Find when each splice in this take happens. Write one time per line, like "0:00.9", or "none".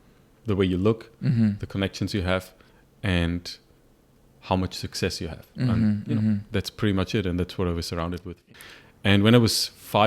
0:08.4